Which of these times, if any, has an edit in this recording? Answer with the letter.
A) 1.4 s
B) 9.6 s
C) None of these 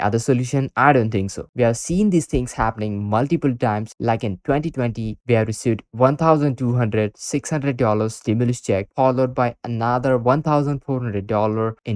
A